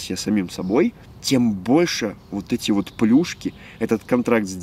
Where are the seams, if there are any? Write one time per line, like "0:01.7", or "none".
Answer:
none